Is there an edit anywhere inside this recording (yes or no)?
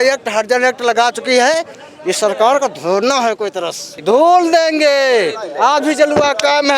yes